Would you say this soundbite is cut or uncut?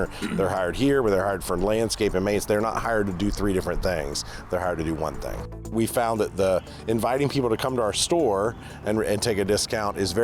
cut